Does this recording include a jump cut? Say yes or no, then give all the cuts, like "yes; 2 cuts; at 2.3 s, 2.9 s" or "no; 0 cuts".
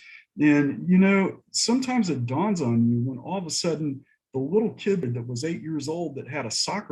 yes; 1 cut; at 5.0 s